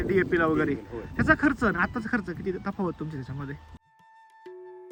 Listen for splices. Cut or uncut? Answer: uncut